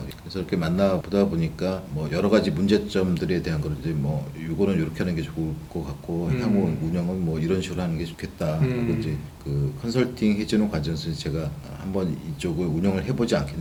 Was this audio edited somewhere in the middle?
no; 0 cuts

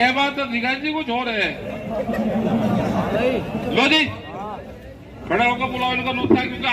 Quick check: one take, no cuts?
yes; 0 cuts

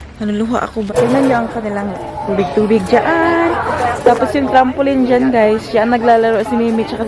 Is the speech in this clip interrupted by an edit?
yes; 1 cut; at 0.9 s

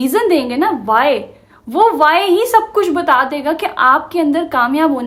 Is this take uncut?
yes; 0 cuts

